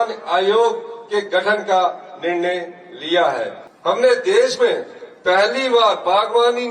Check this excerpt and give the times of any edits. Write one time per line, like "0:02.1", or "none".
0:03.6